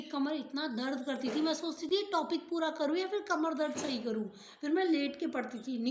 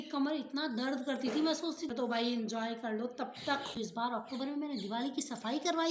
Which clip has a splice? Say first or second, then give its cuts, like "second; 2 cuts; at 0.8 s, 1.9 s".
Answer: second; 2 cuts; at 1.8 s, 3.8 s